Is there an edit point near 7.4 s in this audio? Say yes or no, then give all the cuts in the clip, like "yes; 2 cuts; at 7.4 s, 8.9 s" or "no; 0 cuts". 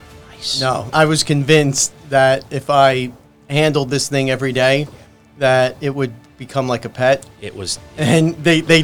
no; 1 cut; at 0.9 s